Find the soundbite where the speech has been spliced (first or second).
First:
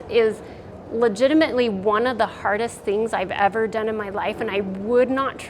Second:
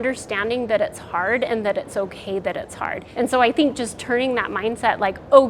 second